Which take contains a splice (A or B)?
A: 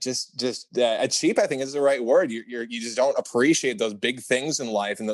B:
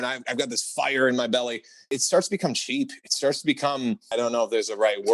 B